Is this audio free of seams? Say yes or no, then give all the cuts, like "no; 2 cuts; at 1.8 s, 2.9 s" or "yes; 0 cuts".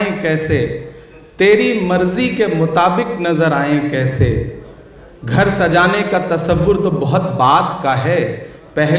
yes; 0 cuts